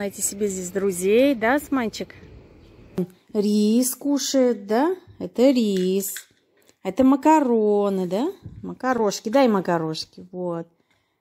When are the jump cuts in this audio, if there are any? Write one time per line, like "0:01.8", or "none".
0:03.0